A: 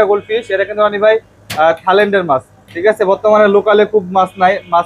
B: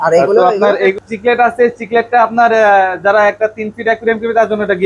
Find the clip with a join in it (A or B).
B